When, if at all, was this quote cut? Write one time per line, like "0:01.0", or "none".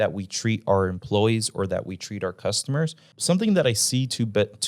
0:03.1